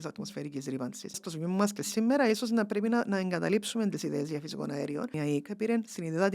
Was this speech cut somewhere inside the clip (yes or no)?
yes